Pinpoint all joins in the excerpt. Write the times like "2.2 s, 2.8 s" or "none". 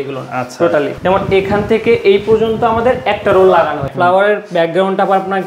0.9 s, 3.9 s